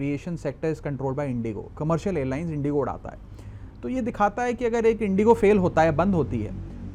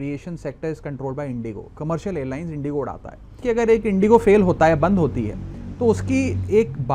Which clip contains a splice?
second; 1 cut; at 3.4 s

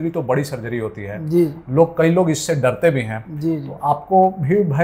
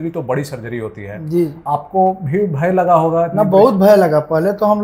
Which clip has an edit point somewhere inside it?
second; 1 cut; at 1.6 s

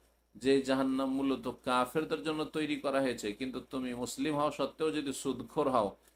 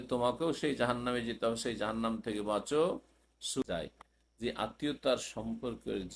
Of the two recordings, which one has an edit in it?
second; 1 cut; at 3.6 s

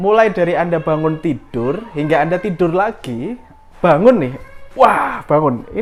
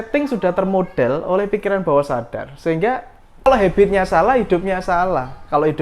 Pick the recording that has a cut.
second; 1 cut; at 3.5 s

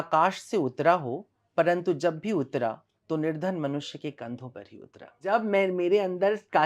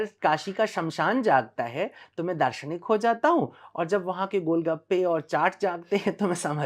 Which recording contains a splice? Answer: first; 1 cut; at 5.3 s

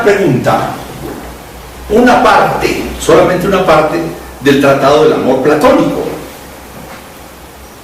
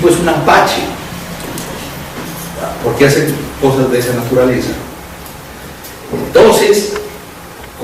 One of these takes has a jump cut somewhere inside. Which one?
second; 1 cut; at 4.9 s

